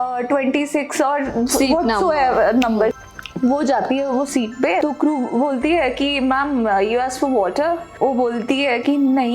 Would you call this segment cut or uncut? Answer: cut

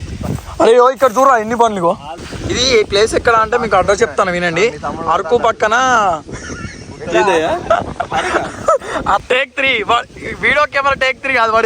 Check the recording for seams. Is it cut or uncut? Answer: cut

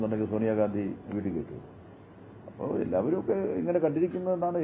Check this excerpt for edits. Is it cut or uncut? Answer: uncut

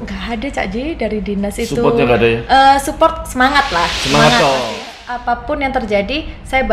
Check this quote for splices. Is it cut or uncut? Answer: cut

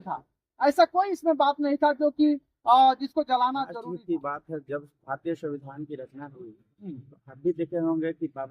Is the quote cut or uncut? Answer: cut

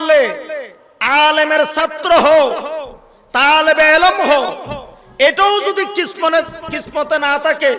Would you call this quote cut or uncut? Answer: uncut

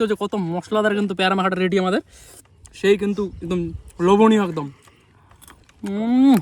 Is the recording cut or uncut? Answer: uncut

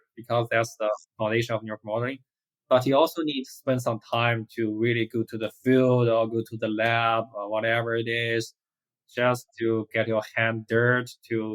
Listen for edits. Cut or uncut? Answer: uncut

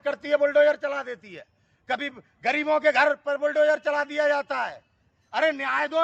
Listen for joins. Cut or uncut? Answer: uncut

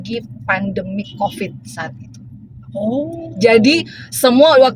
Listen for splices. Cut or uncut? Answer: uncut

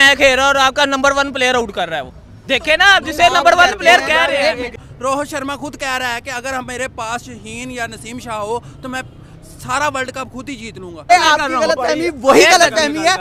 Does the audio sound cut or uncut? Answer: cut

